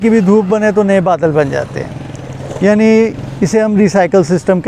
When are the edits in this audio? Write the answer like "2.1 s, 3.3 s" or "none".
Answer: none

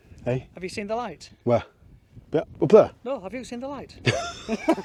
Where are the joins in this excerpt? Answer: none

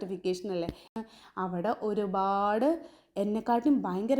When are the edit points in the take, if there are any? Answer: 0.9 s

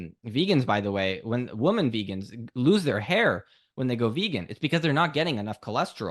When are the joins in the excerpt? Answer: none

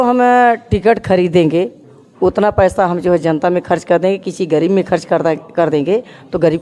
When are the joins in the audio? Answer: none

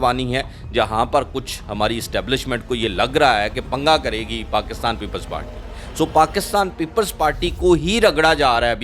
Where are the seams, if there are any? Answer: none

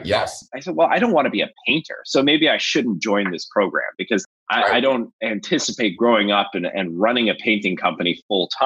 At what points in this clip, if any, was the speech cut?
4.2 s

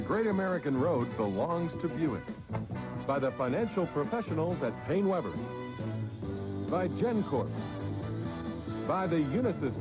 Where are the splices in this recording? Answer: 7.5 s

